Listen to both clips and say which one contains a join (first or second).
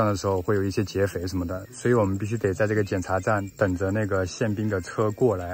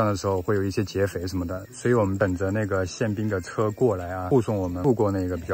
second